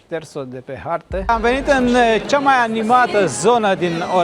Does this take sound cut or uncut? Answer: cut